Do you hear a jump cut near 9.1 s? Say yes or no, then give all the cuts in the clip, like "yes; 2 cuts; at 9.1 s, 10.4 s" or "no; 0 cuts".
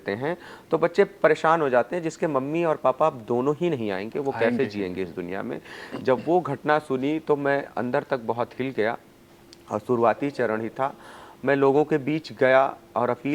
no; 0 cuts